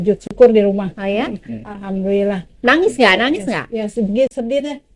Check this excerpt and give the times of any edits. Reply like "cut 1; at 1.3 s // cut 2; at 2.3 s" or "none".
none